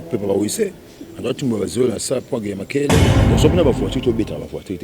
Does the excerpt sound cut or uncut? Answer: cut